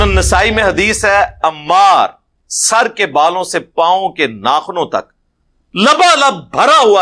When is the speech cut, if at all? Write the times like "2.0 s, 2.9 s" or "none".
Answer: none